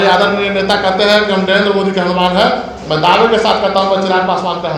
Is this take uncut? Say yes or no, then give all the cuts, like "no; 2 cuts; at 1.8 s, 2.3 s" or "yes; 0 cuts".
yes; 0 cuts